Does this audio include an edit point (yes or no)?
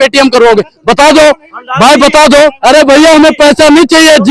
no